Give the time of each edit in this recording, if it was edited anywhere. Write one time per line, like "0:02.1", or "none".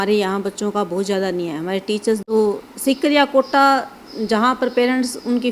0:02.2